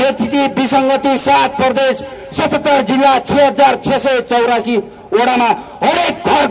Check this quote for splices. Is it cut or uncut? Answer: uncut